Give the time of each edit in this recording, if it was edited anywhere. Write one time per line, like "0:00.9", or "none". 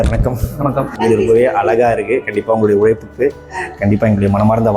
0:00.9